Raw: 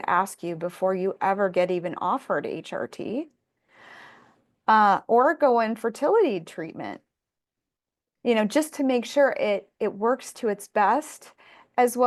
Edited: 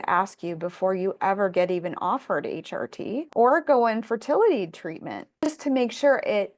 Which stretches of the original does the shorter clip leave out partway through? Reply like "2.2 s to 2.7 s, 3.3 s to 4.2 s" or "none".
3.3 s to 5.0 s, 7.2 s to 8.6 s